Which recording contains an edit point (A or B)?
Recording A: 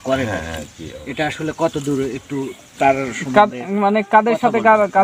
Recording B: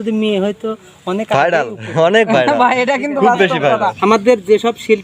B